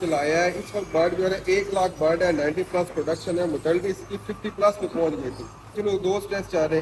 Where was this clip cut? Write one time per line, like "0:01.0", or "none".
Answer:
0:05.7